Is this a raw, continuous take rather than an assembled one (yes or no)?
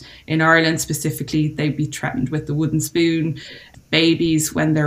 no